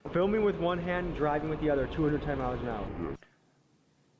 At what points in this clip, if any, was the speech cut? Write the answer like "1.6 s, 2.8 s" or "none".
none